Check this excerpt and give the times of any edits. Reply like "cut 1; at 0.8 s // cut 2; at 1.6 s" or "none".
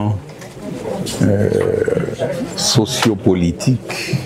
none